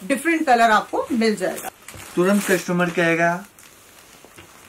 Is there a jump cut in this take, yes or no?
yes